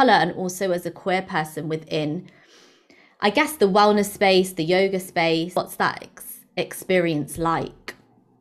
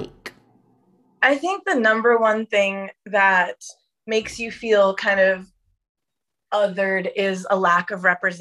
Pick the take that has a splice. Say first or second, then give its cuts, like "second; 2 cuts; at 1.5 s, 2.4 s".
first; 1 cut; at 5.6 s